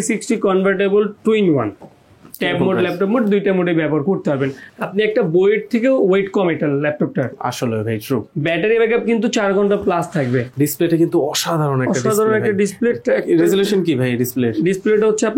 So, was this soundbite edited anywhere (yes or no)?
yes